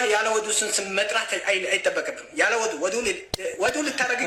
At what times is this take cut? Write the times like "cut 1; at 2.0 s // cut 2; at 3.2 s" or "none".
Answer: none